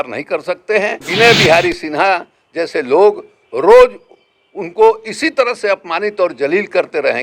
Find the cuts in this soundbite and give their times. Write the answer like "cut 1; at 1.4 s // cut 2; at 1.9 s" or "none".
cut 1; at 1.0 s